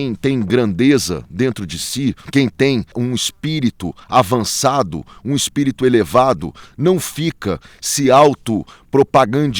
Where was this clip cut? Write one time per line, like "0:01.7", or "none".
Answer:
0:02.2
0:03.0